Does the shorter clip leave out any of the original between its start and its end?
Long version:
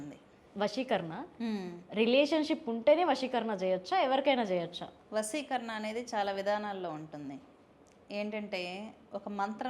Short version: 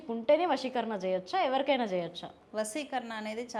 no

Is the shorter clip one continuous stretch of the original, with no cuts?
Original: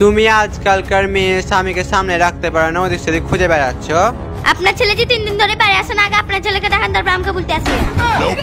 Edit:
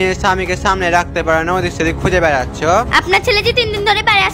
no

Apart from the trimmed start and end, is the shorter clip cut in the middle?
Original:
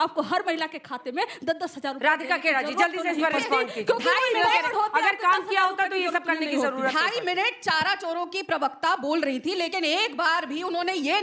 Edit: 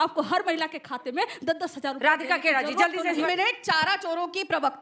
yes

